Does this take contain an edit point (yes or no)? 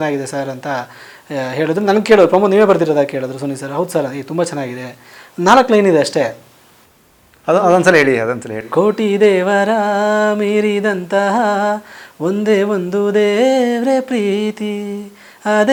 no